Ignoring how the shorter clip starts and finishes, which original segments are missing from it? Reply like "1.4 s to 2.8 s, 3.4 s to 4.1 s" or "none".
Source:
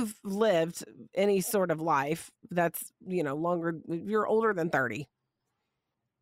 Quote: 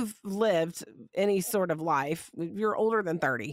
2.4 s to 3.9 s